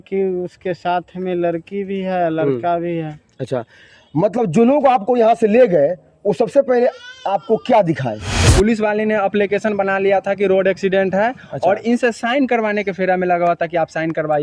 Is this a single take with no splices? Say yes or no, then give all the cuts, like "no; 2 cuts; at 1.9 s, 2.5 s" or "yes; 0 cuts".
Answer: no; 1 cut; at 8.3 s